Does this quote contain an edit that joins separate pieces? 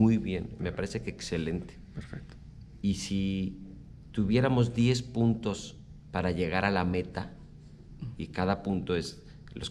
no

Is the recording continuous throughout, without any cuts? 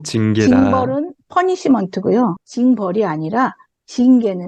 yes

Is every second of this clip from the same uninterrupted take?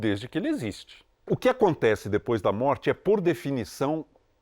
no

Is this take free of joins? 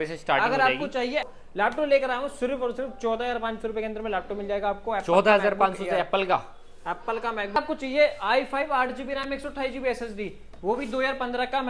no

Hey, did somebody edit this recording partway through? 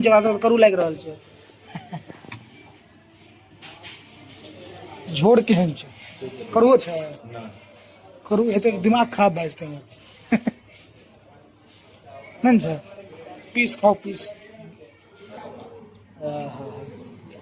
yes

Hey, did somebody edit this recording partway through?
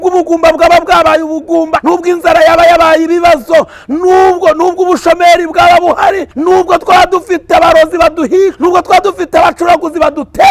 yes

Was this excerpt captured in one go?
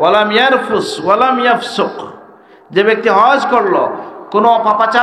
yes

